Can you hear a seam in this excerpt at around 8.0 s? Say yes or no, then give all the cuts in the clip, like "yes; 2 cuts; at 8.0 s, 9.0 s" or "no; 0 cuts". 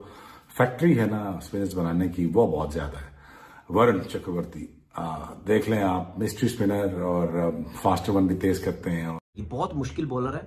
no; 1 cut; at 9.2 s